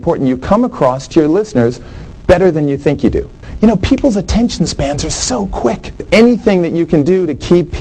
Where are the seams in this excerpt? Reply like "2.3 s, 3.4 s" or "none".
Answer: 3.4 s, 6.0 s

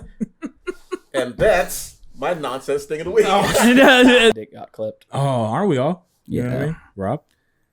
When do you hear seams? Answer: 4.3 s

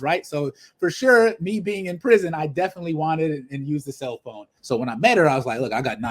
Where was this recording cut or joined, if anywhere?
4.5 s

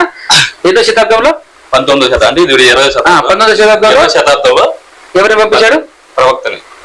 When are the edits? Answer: none

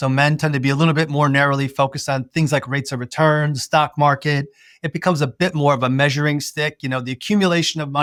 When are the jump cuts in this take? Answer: none

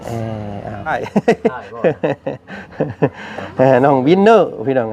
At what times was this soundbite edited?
1.0 s

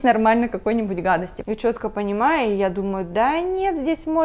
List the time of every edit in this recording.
1.3 s

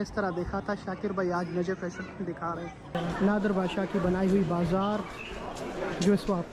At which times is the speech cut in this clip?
2.9 s

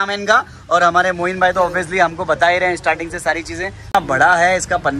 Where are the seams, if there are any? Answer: 3.9 s

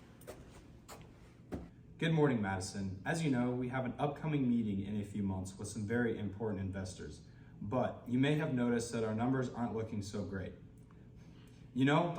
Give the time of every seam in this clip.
1.8 s

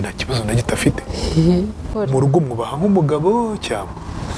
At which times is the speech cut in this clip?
1.9 s

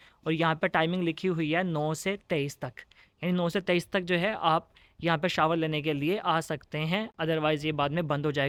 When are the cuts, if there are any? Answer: none

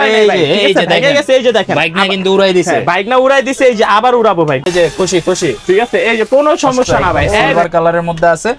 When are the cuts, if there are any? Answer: 4.7 s, 7.5 s

